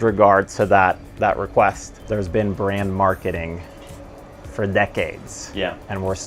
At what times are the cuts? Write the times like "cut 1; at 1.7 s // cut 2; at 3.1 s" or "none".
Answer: cut 1; at 1.9 s